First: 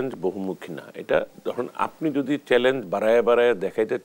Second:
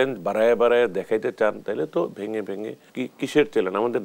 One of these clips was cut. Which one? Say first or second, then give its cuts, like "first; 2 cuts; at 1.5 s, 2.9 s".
second; 1 cut; at 2.8 s